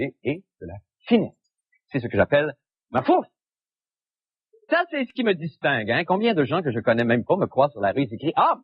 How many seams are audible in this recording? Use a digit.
1